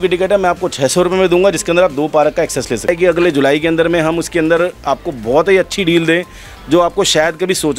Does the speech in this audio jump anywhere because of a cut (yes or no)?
yes